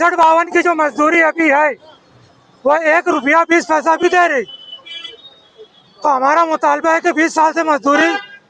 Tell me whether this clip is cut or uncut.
uncut